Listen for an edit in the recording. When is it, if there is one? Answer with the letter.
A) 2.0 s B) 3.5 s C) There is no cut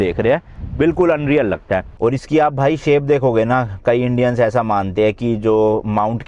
A